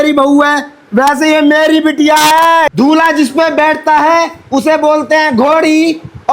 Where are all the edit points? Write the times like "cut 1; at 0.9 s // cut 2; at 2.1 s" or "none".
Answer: cut 1; at 2.7 s